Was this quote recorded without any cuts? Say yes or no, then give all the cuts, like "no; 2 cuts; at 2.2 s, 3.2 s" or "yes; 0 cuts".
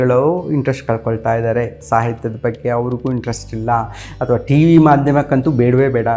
yes; 0 cuts